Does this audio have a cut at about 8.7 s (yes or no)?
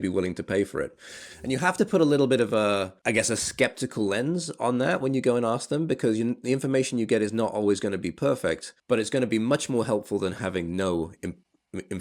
yes